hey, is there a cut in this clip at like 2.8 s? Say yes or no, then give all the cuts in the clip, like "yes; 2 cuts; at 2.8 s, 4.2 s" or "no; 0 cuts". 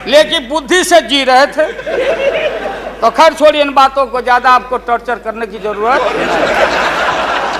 no; 0 cuts